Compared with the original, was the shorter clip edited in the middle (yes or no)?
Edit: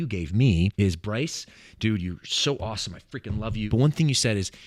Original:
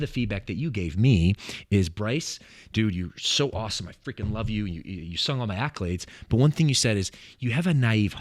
yes